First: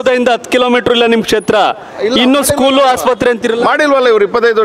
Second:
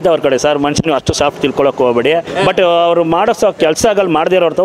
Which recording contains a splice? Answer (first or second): second